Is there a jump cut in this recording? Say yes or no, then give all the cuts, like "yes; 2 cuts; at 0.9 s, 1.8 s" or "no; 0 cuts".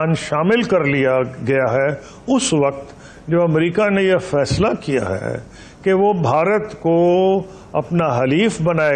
no; 0 cuts